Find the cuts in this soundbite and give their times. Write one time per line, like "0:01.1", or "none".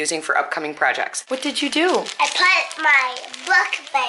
0:01.4